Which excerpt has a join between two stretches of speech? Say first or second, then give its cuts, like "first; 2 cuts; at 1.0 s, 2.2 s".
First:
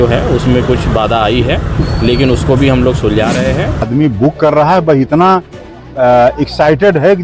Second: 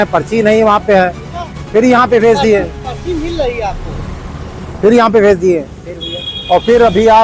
first; 1 cut; at 3.9 s